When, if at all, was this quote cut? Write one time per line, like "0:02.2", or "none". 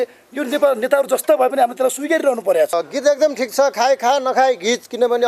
0:02.7